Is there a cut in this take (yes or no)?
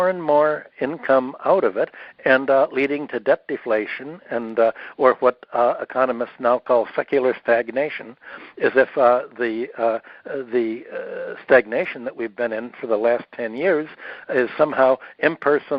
no